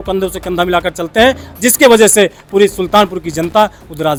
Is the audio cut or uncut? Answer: uncut